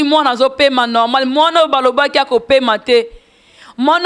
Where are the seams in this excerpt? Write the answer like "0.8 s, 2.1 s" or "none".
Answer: none